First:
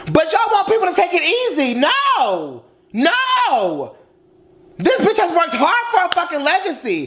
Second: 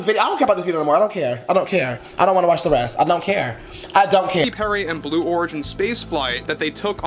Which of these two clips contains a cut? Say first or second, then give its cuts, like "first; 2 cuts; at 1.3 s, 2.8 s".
second; 1 cut; at 4.5 s